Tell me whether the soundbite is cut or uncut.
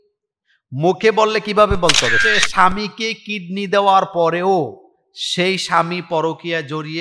cut